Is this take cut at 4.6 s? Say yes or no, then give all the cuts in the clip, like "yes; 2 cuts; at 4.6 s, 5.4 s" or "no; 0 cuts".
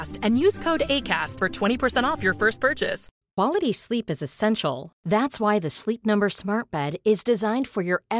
no; 1 cut; at 3.1 s